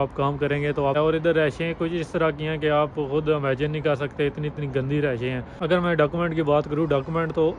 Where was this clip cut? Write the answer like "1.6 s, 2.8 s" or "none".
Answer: 1.0 s, 5.5 s